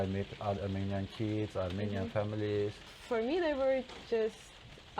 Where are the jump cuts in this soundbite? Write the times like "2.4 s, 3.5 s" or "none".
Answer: 2.9 s